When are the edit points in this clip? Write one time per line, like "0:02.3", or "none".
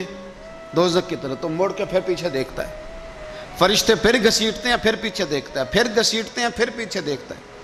none